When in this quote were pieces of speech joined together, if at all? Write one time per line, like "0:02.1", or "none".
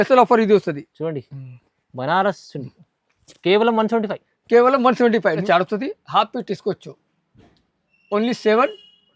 0:05.4